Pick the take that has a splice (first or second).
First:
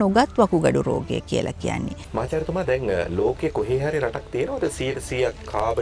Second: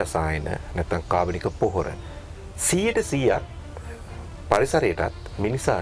first